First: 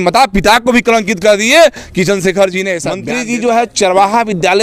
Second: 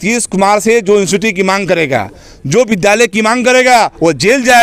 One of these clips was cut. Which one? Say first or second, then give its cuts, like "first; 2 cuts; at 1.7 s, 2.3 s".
first; 1 cut; at 3.0 s